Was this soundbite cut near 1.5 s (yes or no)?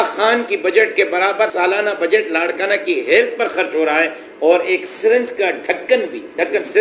yes